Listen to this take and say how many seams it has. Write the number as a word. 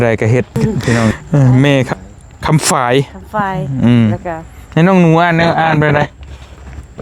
two